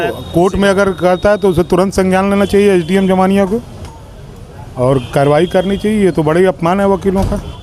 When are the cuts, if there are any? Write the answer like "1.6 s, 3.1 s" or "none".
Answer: none

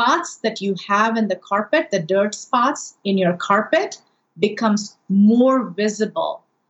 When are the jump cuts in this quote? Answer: none

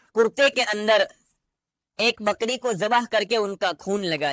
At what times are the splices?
none

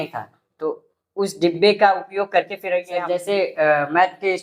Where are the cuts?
2.9 s

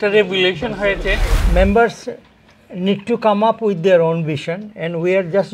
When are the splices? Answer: 1.3 s

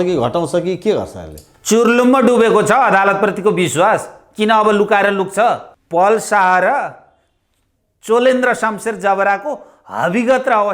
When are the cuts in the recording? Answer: 5.7 s

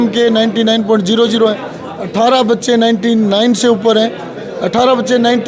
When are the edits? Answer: none

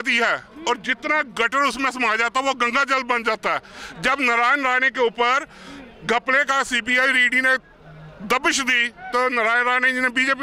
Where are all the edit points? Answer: none

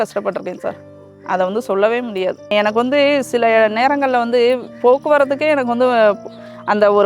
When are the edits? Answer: 2.5 s

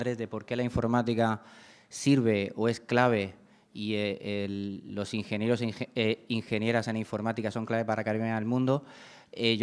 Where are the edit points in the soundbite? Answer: 2.5 s

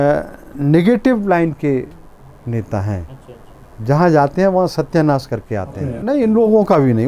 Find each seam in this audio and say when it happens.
5.9 s

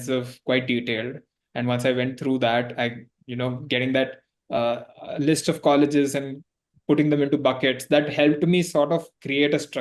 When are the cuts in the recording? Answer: none

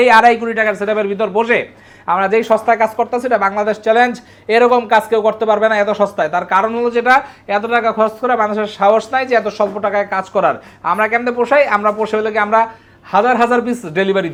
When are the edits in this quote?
none

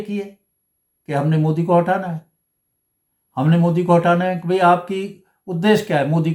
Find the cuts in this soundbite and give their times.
none

